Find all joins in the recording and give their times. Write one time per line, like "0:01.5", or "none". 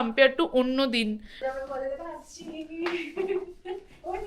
0:01.3